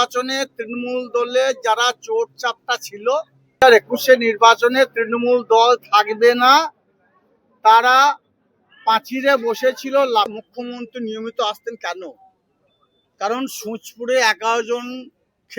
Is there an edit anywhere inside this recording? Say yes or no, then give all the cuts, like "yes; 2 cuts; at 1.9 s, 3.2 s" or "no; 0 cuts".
yes; 2 cuts; at 3.6 s, 10.4 s